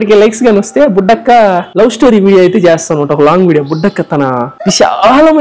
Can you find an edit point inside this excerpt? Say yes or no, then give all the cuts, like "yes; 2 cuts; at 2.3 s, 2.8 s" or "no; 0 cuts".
no; 0 cuts